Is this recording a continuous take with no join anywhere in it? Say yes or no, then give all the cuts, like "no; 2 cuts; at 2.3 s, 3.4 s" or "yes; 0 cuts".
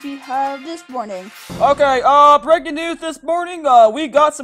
no; 1 cut; at 1.4 s